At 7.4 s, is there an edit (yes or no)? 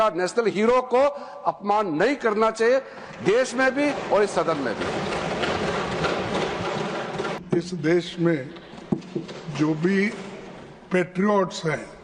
yes